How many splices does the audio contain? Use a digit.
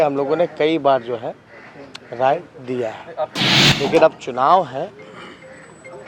1